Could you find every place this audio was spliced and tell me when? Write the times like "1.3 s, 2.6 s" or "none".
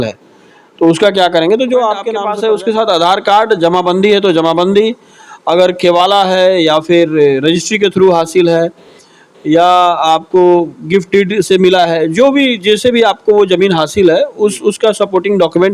2.1 s